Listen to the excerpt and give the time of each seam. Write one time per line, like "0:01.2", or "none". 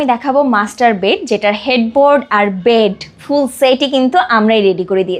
none